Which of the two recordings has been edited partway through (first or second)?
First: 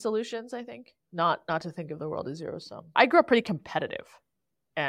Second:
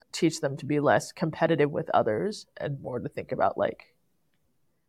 first